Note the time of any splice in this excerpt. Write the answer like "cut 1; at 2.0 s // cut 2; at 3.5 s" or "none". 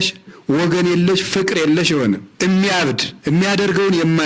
cut 1; at 2.3 s // cut 2; at 3.1 s